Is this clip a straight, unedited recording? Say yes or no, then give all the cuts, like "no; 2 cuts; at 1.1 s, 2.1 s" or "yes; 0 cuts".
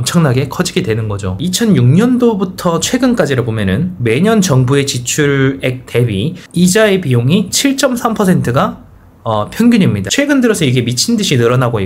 no; 2 cuts; at 1.4 s, 10.0 s